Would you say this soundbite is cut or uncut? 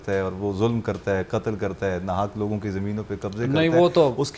uncut